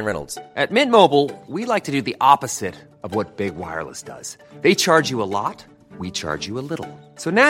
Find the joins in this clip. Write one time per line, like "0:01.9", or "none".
none